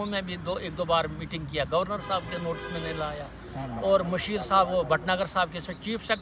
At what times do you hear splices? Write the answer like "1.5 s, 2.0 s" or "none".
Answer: none